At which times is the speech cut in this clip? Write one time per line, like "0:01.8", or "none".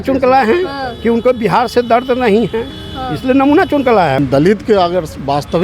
0:04.2